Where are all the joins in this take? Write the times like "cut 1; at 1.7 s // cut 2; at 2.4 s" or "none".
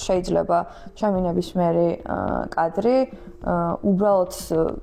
none